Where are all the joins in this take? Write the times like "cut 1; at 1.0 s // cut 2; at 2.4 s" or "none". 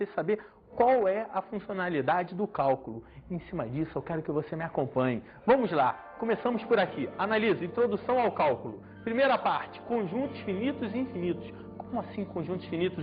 cut 1; at 1.3 s